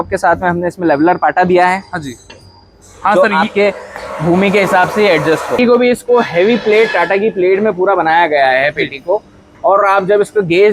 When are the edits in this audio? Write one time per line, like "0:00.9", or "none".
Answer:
0:05.6